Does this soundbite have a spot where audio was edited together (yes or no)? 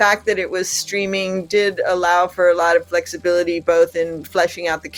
no